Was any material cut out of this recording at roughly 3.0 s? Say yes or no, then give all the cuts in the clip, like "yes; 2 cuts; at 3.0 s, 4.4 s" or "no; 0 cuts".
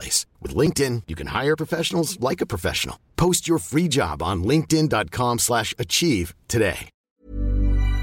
no; 1 cut; at 6.9 s